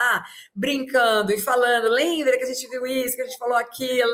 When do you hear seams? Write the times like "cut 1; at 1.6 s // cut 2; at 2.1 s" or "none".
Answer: none